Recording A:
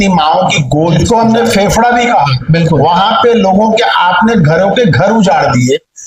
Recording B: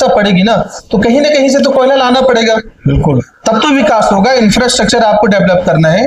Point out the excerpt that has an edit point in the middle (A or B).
A